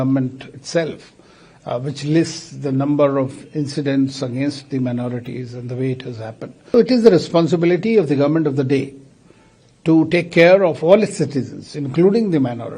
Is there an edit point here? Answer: yes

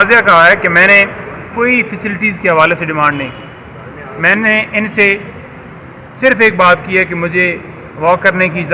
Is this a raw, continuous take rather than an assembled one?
yes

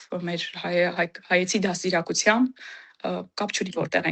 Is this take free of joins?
yes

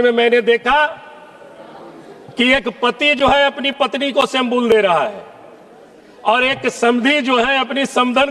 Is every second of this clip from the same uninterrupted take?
yes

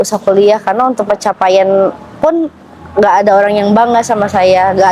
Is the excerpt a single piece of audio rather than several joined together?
yes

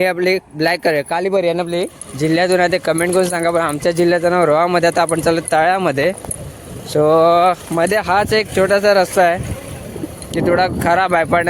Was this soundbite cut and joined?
yes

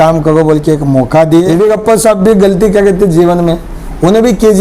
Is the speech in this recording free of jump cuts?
no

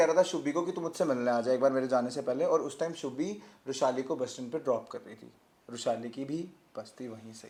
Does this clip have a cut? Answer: no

